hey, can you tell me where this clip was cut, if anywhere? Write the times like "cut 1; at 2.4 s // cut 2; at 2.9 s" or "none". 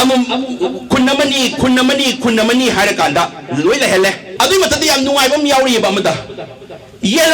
cut 1; at 4.3 s